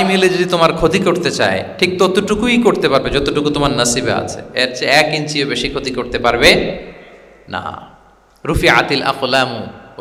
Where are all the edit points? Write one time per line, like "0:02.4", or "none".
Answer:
none